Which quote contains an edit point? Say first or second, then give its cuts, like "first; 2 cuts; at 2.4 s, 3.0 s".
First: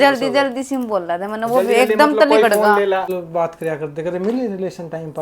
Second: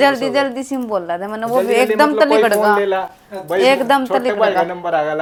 first; 1 cut; at 3.2 s